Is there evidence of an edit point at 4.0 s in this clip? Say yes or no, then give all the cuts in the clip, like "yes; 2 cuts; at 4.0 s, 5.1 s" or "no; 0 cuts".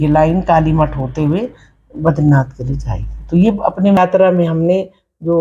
yes; 1 cut; at 4.0 s